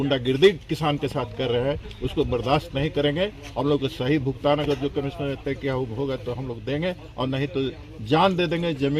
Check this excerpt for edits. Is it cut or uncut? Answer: uncut